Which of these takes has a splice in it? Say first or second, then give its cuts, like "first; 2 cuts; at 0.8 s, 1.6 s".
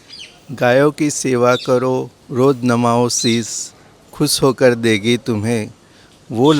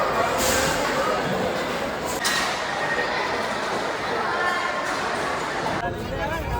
second; 2 cuts; at 2.2 s, 5.8 s